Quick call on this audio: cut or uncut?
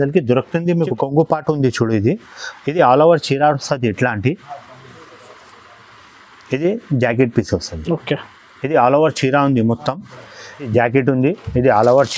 cut